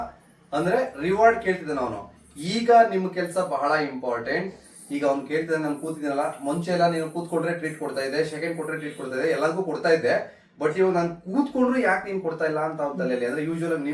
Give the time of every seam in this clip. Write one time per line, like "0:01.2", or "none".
none